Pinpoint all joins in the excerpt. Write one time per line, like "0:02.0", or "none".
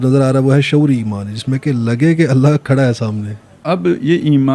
0:03.6